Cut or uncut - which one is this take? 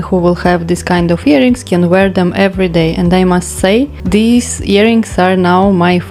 cut